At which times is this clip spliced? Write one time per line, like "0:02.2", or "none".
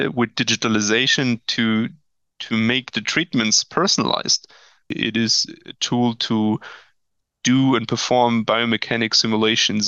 0:04.9